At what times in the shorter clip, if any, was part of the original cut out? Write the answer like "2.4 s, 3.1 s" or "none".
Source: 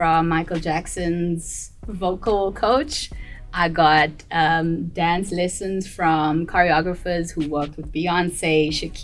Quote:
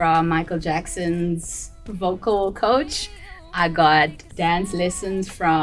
4.3 s